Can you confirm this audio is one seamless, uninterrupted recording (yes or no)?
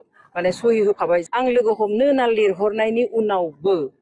no